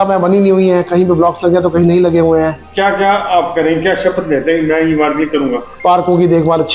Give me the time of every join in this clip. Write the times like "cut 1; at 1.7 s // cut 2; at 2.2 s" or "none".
cut 1; at 2.6 s // cut 2; at 5.8 s